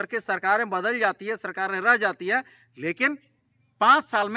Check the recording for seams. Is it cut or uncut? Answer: uncut